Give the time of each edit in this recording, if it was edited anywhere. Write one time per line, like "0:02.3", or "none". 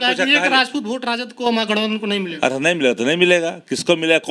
none